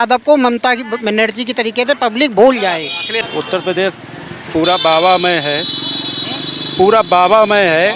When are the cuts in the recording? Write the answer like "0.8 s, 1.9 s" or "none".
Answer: 3.2 s